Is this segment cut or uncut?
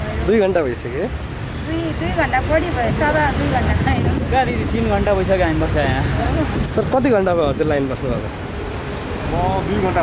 uncut